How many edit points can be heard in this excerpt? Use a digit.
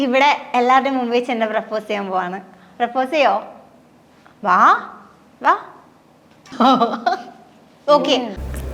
0